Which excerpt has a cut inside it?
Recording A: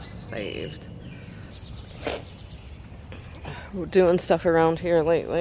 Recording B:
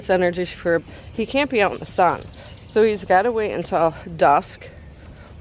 A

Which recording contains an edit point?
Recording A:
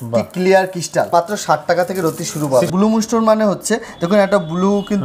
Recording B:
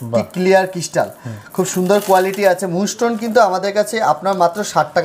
A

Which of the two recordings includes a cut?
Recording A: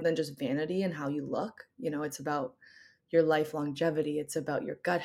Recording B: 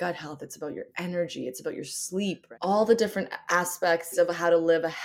B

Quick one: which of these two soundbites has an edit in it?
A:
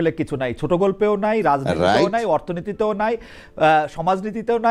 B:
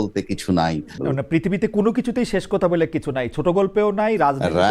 B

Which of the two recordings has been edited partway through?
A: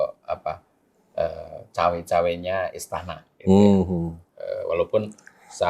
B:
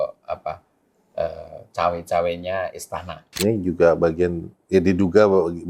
B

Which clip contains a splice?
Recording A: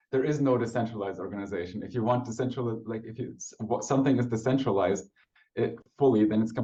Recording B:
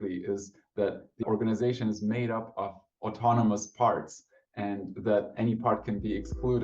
B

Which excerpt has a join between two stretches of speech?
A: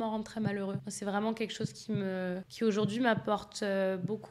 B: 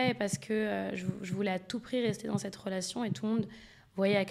A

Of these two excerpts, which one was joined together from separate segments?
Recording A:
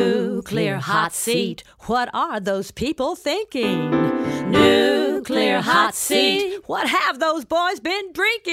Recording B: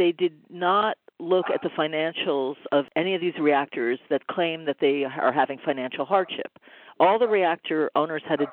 B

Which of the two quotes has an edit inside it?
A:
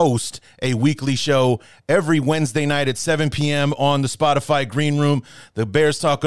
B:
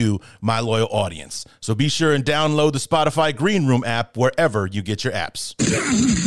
B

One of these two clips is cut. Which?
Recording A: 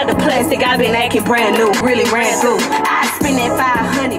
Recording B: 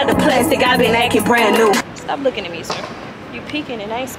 B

